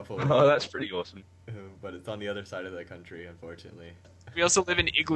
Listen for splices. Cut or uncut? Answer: cut